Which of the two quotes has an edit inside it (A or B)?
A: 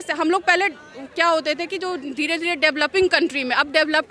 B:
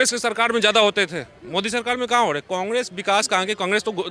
B